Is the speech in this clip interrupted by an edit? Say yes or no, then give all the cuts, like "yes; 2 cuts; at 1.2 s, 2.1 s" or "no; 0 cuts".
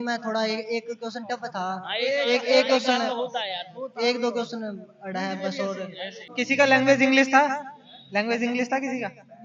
yes; 1 cut; at 6.3 s